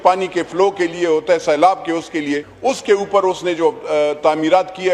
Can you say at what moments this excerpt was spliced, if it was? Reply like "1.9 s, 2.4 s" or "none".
2.5 s